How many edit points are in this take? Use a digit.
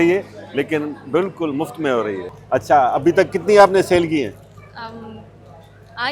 1